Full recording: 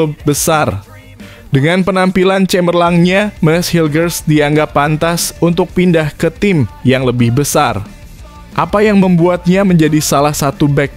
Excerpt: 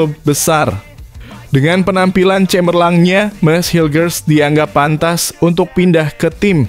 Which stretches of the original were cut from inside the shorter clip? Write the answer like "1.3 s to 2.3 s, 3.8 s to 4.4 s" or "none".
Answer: none